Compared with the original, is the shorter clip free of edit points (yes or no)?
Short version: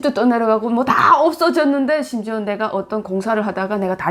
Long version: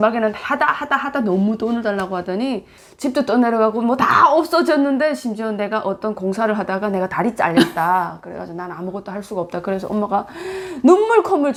yes